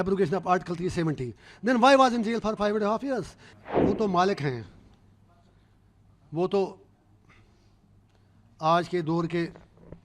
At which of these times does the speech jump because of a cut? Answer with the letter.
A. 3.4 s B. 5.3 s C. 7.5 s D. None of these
A